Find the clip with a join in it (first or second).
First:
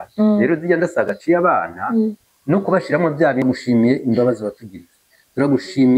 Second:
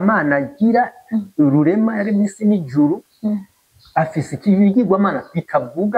first